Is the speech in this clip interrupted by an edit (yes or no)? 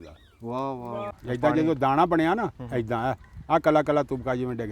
yes